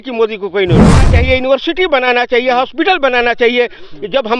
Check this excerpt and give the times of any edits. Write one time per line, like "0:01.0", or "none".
0:01.1